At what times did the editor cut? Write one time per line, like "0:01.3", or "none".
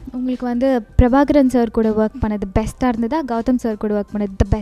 none